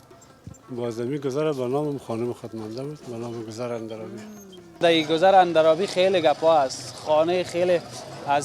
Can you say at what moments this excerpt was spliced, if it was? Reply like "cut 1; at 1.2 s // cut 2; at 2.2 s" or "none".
cut 1; at 4.7 s